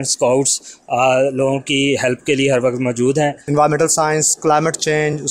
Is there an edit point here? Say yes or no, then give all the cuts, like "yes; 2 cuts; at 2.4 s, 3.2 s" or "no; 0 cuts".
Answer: yes; 1 cut; at 3.4 s